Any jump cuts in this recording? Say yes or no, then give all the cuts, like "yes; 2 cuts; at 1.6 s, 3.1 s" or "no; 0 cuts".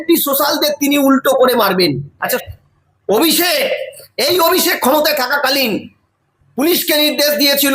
yes; 1 cut; at 2.4 s